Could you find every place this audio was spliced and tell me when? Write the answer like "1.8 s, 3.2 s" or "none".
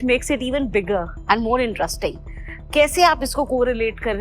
none